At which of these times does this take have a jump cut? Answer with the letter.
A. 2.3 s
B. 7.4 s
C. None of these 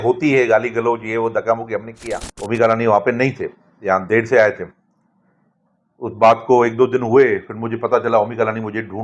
A